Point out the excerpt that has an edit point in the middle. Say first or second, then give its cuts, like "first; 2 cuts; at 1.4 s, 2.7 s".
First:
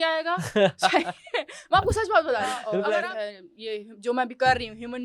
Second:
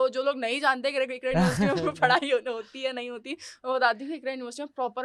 first; 1 cut; at 3.1 s